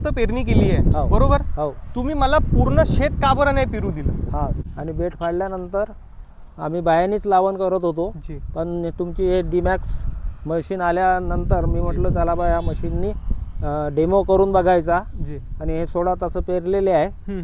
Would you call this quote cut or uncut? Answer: cut